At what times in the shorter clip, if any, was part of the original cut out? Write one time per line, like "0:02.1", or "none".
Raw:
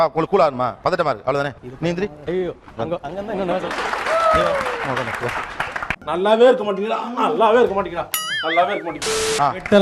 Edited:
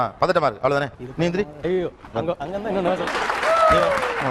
none